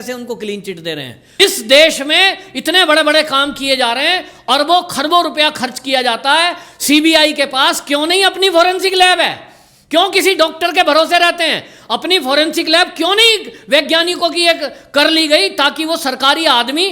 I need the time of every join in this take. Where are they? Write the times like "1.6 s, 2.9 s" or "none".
1.3 s